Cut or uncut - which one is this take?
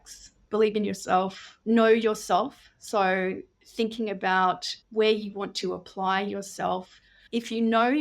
cut